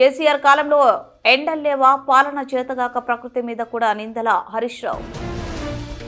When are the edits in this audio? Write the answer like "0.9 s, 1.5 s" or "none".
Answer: none